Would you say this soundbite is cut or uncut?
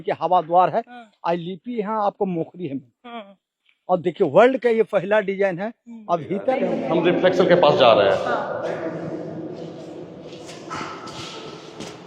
cut